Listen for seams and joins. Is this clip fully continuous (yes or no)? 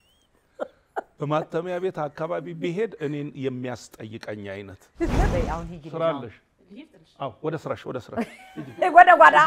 no